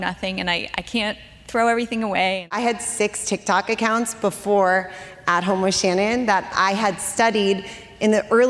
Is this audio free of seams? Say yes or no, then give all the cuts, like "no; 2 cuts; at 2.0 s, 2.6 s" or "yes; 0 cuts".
no; 1 cut; at 2.5 s